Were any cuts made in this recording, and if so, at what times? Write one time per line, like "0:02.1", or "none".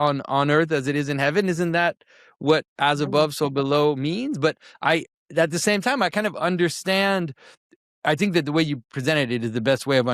none